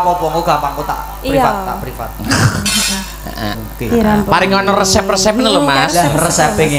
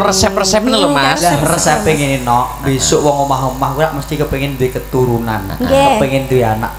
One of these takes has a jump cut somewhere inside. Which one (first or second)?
first